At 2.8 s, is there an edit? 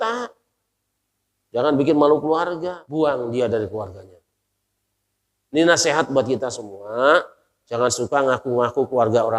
yes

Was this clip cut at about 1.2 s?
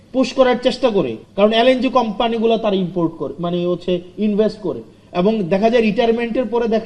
yes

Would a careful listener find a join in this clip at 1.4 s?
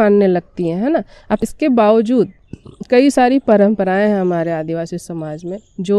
yes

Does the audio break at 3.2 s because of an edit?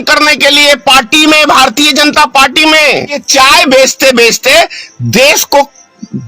yes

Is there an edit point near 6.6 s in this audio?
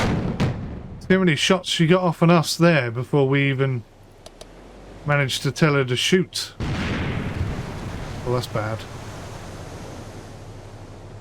no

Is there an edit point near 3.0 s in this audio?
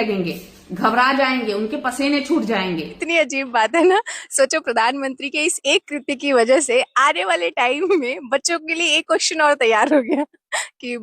yes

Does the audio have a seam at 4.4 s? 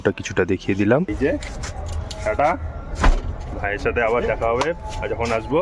no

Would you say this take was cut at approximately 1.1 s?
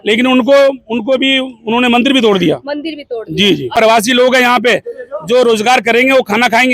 no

